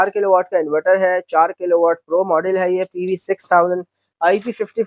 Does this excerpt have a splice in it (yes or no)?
no